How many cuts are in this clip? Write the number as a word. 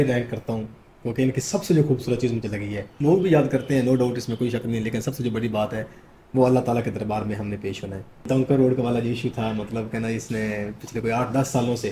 two